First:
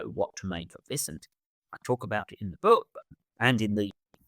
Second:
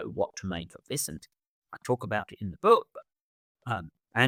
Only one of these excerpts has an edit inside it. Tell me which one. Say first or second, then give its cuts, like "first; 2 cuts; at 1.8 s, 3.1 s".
first; 1 cut; at 3.2 s